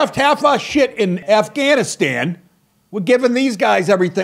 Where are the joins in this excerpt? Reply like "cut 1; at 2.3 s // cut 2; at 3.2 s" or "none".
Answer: cut 1; at 1.2 s